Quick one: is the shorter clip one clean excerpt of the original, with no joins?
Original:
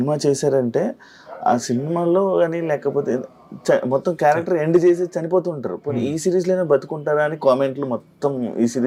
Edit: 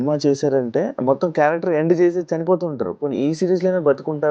no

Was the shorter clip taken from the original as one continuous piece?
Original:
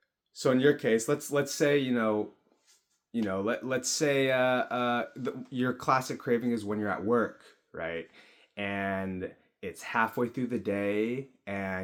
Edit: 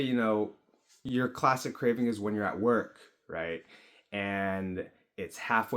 no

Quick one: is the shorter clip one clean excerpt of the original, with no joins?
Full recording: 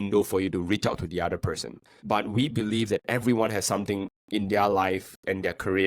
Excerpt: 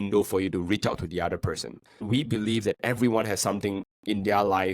no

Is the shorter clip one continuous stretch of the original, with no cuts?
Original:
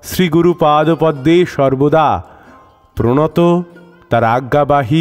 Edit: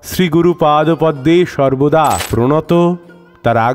no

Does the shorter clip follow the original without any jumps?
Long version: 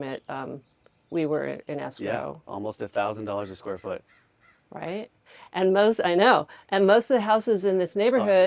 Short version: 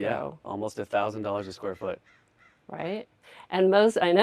yes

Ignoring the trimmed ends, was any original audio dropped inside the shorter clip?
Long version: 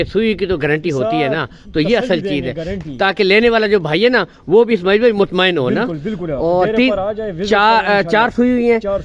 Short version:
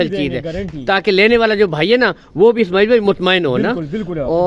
no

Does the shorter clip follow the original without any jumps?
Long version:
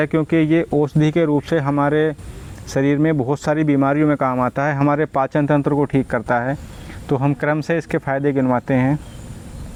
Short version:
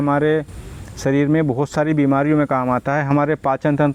yes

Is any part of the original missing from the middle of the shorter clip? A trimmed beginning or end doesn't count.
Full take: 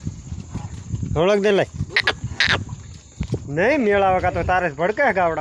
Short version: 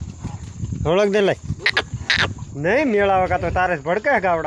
yes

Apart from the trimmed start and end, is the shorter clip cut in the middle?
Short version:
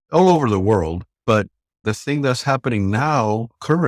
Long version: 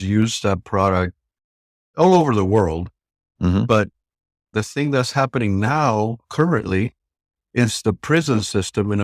yes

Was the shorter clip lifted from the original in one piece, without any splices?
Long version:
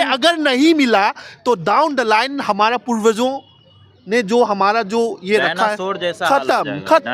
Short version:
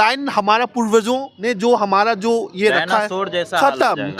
no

